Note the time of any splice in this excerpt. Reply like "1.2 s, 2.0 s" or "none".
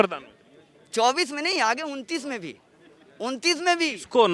none